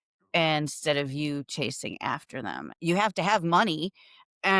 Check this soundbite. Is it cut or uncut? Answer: cut